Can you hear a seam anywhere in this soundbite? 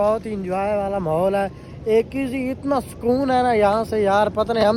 no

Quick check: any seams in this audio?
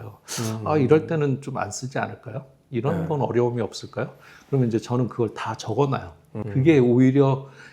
yes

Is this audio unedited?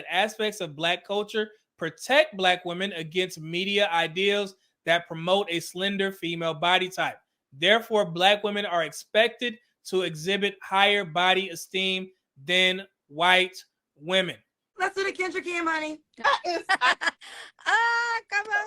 no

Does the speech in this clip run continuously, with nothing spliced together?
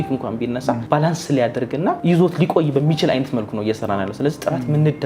yes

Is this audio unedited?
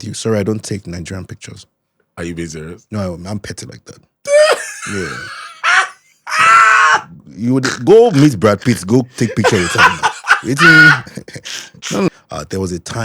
no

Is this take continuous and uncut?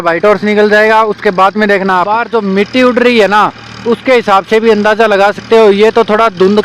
no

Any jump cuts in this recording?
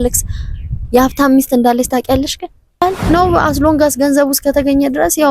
yes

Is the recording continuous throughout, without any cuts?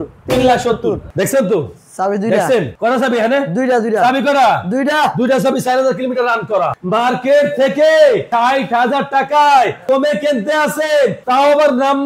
no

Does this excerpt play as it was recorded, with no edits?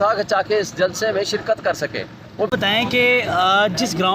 no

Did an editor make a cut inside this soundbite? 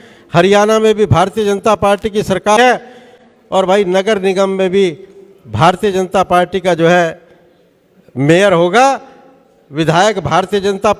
yes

